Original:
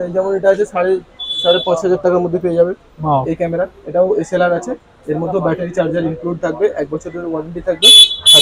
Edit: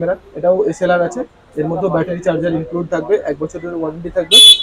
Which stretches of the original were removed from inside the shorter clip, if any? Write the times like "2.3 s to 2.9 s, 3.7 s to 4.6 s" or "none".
none

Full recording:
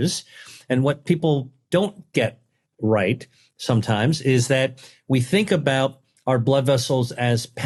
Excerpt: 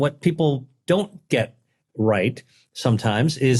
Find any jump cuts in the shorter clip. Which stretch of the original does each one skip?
none

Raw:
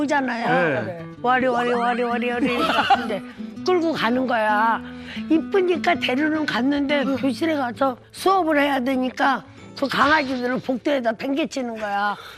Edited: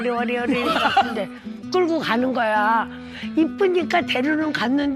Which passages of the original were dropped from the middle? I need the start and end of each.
none

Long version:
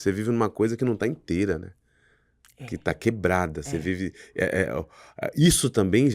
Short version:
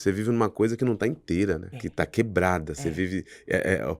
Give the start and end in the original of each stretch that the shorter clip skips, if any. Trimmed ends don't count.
1.8 s to 2.6 s

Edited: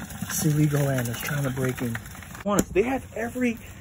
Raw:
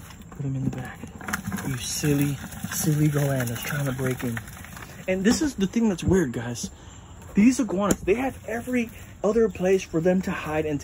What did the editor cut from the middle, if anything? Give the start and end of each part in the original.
4.8 s to 7.7 s

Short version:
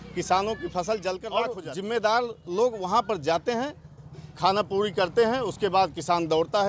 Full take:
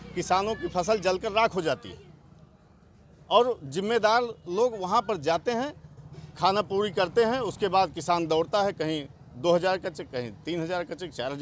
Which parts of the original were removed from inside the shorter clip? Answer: 1.5 s to 3.5 s

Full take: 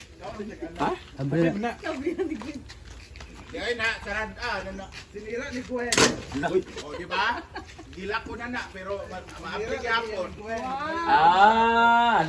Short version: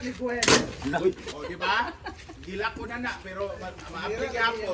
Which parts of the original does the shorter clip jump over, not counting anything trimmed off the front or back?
none

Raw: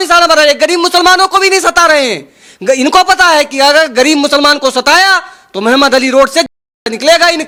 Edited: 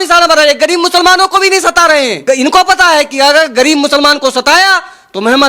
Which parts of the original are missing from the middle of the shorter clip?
2.2 s to 2.6 s

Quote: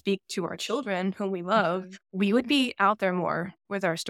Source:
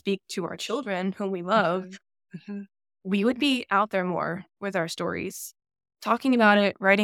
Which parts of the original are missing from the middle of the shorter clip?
2.0 s to 2.9 s

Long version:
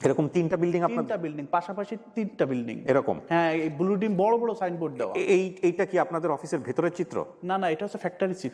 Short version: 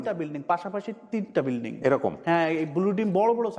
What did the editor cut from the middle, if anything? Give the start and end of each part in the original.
none

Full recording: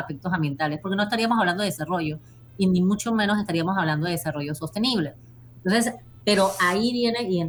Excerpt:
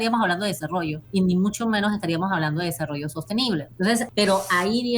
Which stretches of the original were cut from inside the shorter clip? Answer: 2.2 s to 2.4 s, 5.4 s to 6.1 s

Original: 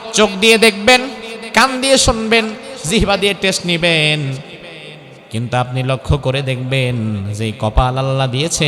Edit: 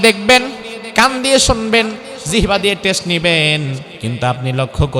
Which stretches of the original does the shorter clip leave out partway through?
4.5 s to 5.2 s

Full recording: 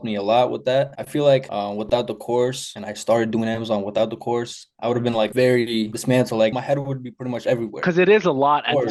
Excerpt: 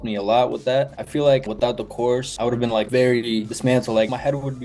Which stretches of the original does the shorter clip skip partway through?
1.9 s to 4.3 s

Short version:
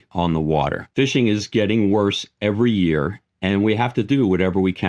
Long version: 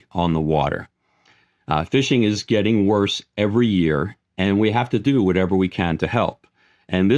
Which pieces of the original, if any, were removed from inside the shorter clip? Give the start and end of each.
0.9 s to 1.9 s

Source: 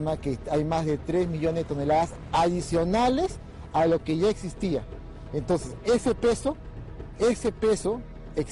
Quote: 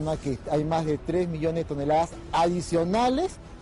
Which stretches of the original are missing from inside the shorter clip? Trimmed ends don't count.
none

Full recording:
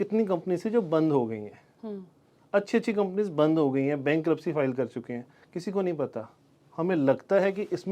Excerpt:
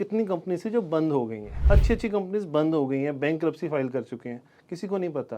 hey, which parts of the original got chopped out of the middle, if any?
1.5 s to 2.3 s

